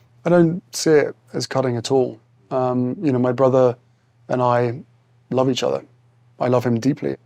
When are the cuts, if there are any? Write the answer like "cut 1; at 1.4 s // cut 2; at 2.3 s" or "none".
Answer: none